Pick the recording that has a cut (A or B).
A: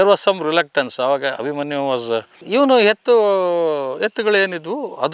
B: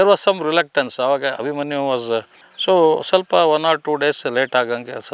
A